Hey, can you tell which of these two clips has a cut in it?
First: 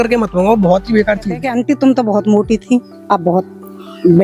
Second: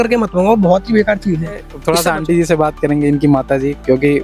first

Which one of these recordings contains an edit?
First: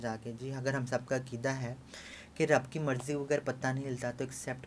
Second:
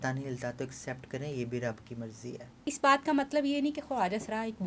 second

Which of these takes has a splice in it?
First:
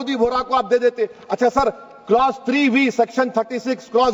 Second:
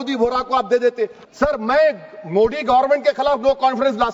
second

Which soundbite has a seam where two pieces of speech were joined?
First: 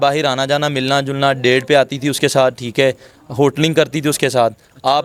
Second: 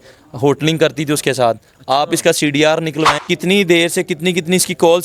second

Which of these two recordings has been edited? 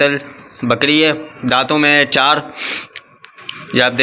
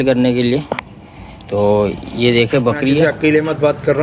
second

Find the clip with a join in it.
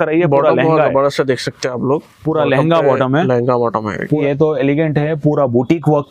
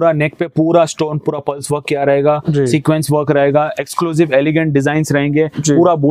first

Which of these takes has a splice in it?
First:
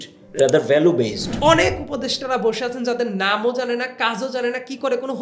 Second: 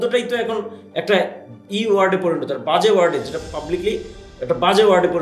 first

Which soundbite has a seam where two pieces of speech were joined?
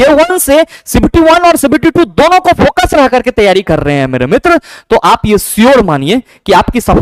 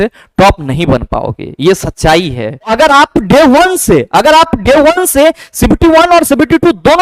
second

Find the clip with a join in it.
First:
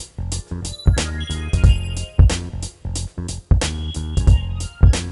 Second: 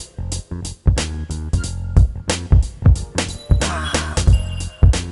first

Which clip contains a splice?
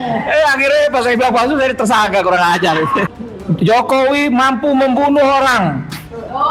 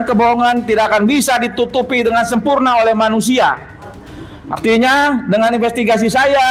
first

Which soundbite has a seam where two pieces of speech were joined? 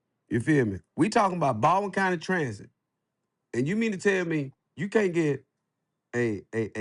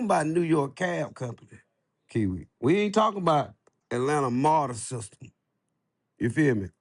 second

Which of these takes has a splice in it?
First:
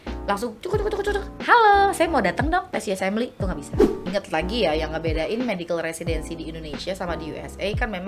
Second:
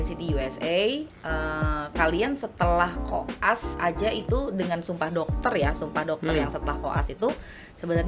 first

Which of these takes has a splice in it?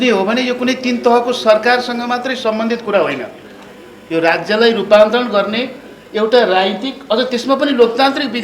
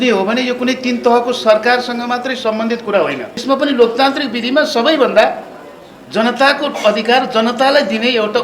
second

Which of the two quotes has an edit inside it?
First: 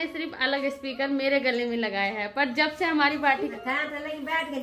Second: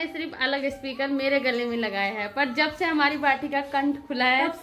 first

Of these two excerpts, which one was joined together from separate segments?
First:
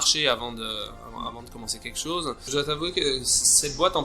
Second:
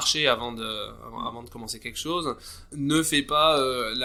first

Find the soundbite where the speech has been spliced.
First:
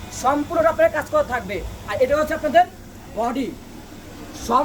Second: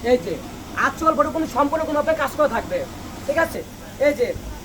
second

